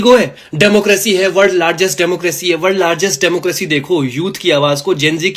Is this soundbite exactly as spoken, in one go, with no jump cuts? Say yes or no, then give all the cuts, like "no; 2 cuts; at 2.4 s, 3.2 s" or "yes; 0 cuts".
yes; 0 cuts